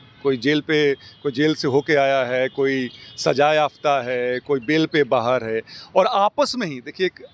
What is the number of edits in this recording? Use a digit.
0